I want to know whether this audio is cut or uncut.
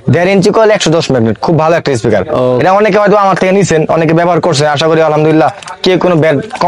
uncut